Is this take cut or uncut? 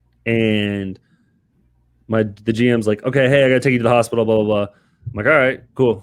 uncut